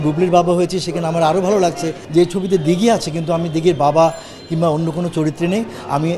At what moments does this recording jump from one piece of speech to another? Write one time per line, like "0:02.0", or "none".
0:02.0